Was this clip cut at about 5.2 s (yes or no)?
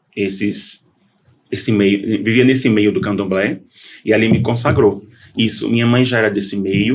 yes